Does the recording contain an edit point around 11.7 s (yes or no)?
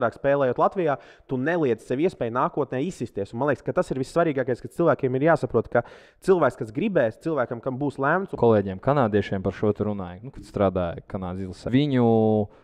yes